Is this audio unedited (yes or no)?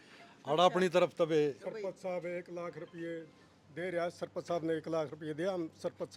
yes